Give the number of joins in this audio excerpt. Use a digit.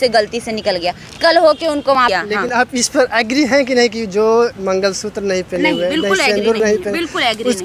1